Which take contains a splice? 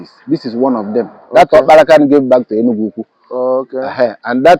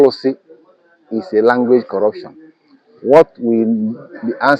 first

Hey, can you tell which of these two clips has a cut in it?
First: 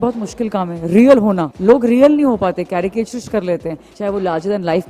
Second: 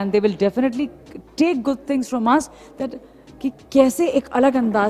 first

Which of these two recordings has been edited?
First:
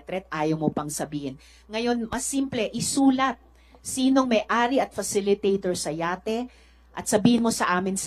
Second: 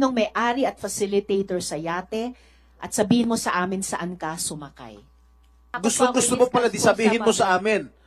second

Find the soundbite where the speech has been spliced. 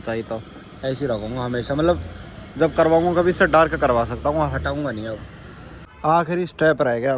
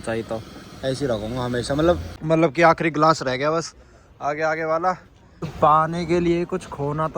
second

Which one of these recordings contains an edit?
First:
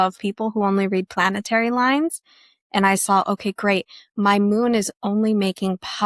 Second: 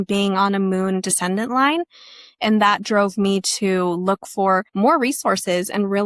second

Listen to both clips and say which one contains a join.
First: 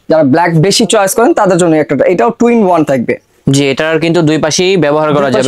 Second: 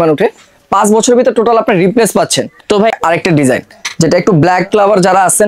second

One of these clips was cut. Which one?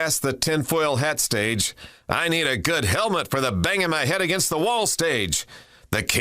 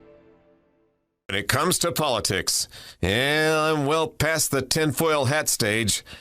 second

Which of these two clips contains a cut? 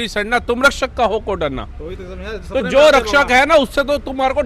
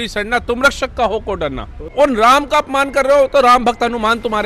second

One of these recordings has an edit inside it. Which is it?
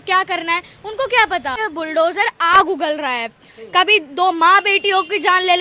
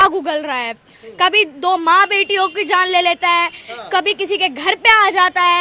first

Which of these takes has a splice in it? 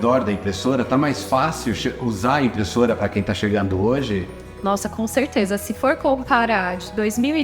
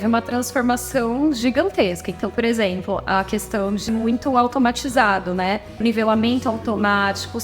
second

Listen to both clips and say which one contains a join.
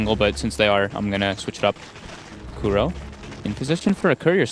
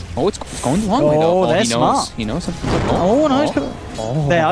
second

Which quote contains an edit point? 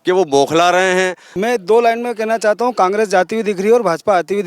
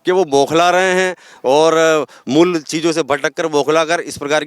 first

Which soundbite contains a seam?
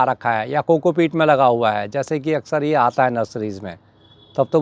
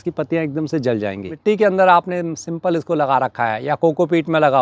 second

